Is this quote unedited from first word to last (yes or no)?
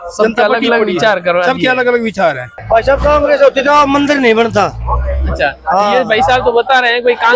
no